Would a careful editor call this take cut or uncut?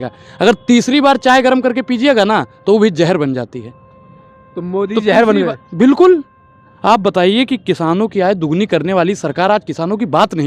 uncut